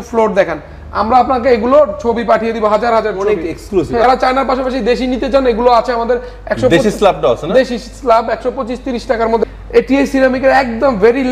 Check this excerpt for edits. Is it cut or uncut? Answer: cut